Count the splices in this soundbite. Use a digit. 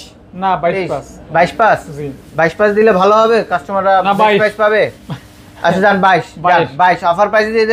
0